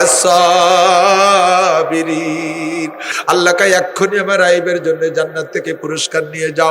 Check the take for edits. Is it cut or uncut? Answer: cut